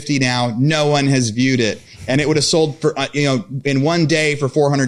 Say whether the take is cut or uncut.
uncut